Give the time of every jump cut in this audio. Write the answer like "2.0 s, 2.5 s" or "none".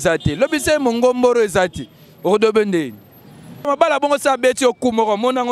3.7 s